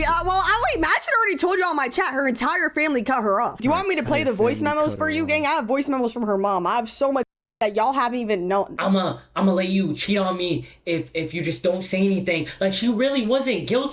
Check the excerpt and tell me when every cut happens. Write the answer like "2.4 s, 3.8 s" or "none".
3.6 s, 5.7 s, 8.7 s